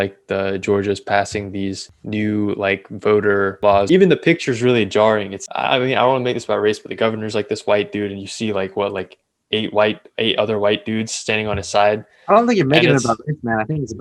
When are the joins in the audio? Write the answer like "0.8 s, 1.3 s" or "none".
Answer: 1.9 s, 3.7 s, 5.4 s